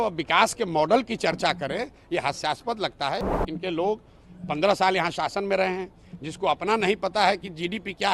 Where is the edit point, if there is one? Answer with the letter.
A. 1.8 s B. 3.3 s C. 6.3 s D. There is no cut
B